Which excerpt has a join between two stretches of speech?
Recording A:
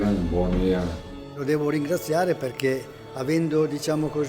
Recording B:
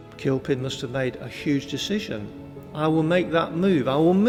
A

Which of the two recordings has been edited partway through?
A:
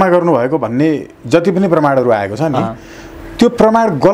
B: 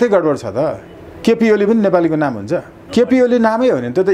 B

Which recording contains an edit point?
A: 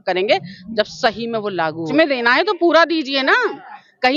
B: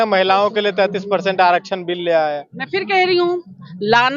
A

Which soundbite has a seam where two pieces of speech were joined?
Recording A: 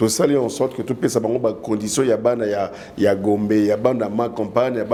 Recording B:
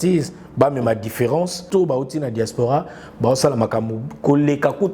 B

